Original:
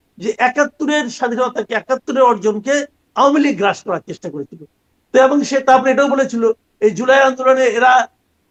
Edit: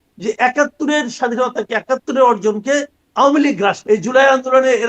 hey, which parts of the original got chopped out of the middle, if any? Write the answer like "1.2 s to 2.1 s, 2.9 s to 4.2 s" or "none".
3.8 s to 6.7 s